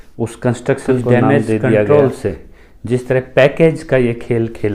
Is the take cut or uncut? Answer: cut